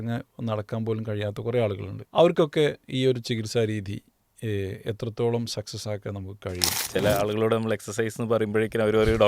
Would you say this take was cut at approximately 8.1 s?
no; 2 cuts; at 1.9 s, 6.7 s

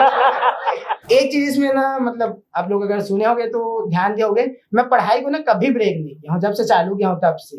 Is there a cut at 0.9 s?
yes; 1 cut; at 0.9 s

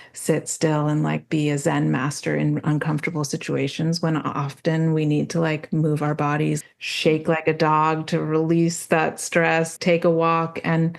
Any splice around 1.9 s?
no; 2 cuts; at 6.6 s, 9.7 s

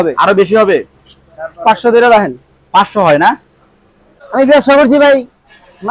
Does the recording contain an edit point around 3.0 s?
no; 1 cut; at 4.3 s

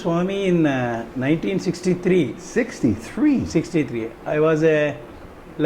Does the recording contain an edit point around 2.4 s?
no; 0 cuts

